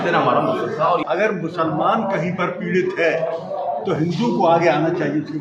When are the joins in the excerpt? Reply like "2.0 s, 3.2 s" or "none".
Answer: 1.0 s